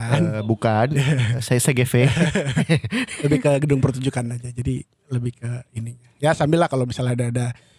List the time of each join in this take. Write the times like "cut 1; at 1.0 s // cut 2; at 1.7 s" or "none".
none